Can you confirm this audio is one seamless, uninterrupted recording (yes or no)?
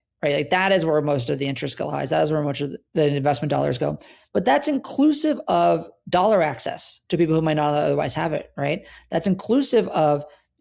no